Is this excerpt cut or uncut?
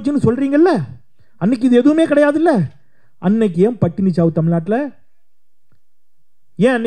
uncut